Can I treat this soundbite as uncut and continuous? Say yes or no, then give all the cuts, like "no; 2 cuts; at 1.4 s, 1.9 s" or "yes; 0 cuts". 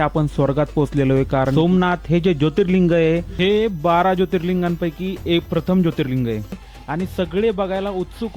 no; 1 cut; at 6.6 s